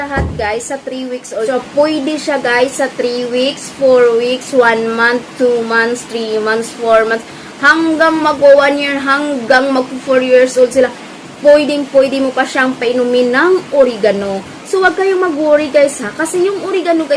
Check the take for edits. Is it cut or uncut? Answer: cut